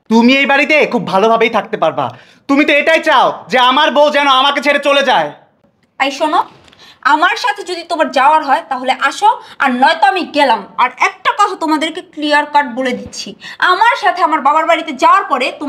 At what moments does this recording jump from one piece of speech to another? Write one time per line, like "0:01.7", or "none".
none